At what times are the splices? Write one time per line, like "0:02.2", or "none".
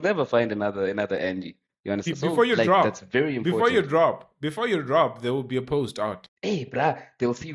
none